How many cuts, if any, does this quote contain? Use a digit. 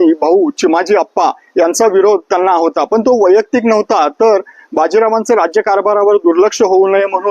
0